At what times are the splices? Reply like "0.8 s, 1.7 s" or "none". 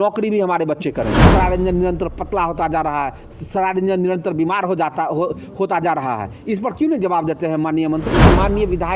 1.3 s, 8.2 s